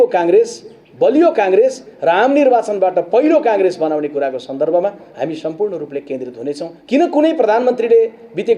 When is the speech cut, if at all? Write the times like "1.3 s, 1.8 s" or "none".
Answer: 6.7 s